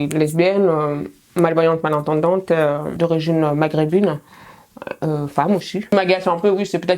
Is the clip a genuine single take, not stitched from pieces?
no; 2 cuts; at 2.9 s, 5.8 s

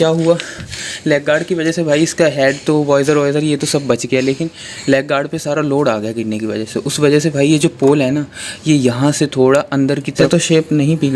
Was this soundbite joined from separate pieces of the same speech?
yes; 1 cut; at 10.2 s

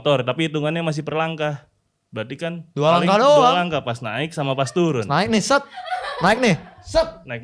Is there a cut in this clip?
no; 0 cuts

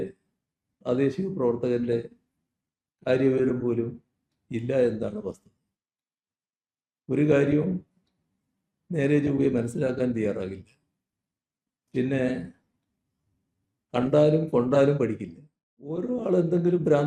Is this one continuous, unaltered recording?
no; 1 cut; at 16.0 s

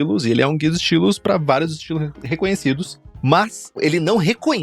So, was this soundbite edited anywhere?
yes; 1 cut; at 3.4 s

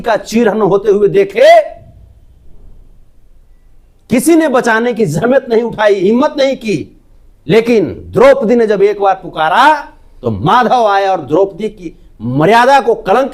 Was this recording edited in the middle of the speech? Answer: no; 0 cuts

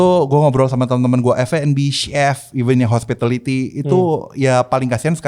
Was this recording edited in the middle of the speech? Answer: no; 0 cuts

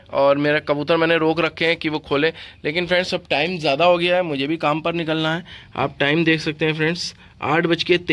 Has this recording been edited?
no; 0 cuts

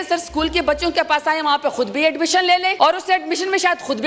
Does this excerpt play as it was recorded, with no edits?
no; 1 cut; at 2.7 s

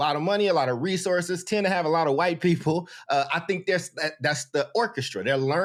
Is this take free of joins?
yes; 0 cuts

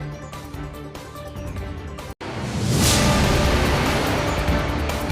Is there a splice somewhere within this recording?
no; 0 cuts

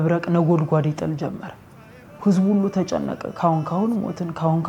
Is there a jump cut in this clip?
no; 0 cuts

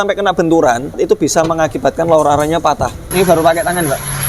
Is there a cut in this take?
yes; 2 cuts; at 1.0 s, 3.1 s

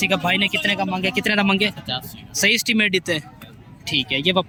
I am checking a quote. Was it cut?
no; 0 cuts

